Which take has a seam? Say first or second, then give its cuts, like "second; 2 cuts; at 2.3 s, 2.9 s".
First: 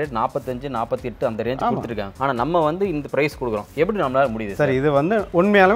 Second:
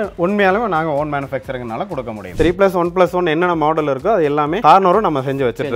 second; 2 cuts; at 2.3 s, 4.6 s